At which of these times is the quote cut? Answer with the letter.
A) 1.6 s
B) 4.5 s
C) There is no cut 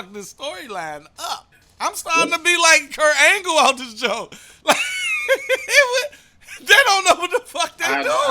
A